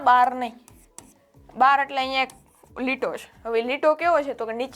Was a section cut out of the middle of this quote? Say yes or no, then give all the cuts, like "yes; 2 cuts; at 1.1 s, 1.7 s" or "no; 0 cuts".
no; 0 cuts